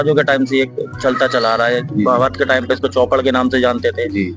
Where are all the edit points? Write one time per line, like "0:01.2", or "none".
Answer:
none

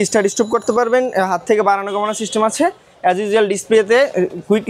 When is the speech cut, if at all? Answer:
none

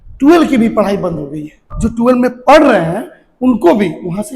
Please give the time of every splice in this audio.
0:01.6

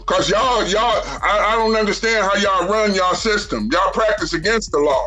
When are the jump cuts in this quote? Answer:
none

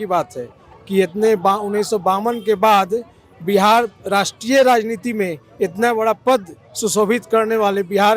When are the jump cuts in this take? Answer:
none

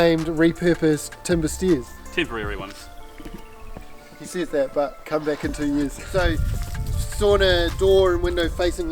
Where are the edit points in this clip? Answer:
0:06.0

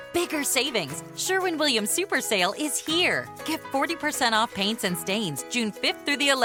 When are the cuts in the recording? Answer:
none

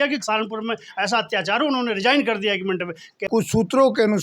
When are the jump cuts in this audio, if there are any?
0:03.3

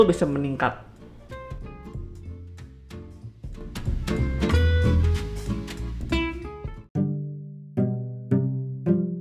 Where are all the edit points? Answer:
none

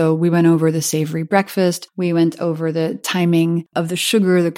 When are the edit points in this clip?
0:01.9
0:03.7

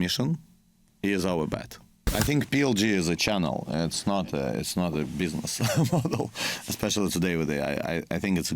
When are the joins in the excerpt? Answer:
0:02.0

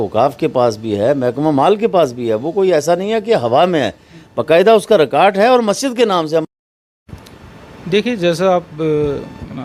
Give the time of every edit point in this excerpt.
0:07.0

